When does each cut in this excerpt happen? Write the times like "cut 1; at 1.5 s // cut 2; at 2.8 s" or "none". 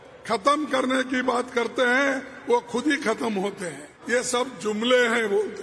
cut 1; at 3.9 s

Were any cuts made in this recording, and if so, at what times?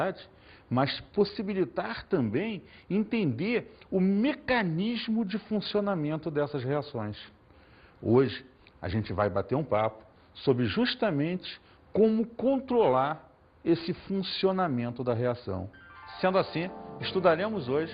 cut 1; at 7.2 s

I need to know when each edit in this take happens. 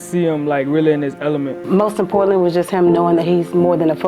cut 1; at 1.6 s

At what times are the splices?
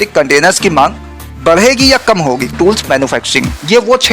cut 1; at 2.6 s

